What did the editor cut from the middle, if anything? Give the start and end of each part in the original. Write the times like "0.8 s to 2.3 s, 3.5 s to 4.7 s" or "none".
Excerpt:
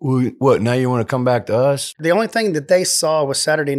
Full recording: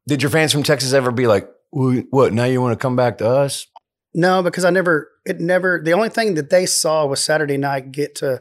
3.7 s to 5.8 s